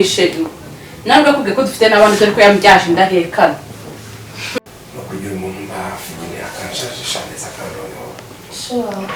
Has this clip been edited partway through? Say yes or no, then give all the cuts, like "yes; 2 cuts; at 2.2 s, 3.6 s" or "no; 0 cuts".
yes; 1 cut; at 4.6 s